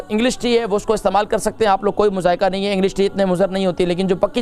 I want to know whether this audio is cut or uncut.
uncut